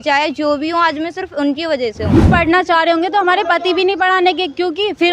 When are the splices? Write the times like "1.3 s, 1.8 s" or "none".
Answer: 2.3 s